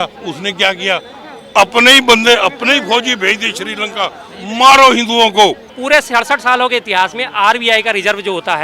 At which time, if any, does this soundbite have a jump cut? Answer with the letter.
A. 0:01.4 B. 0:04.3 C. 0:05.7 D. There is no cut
C